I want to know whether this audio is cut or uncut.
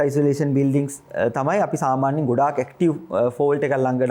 uncut